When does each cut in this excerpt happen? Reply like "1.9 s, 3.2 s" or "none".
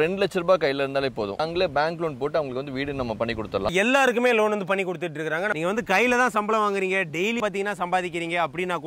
1.4 s, 3.7 s, 5.5 s, 7.4 s